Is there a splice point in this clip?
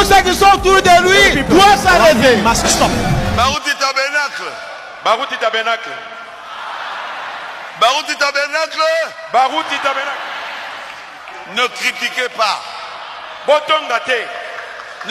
no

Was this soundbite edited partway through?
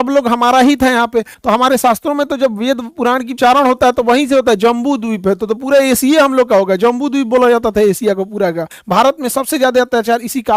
yes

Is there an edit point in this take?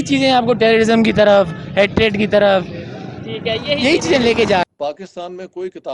yes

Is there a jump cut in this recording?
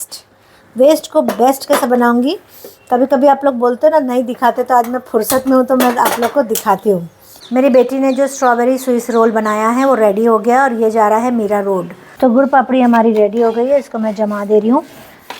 yes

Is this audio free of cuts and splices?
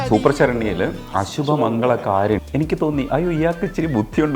no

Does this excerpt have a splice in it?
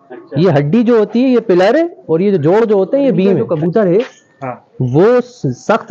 yes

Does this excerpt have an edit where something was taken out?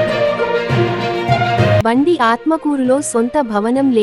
no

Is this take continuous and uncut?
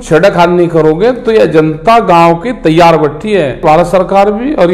no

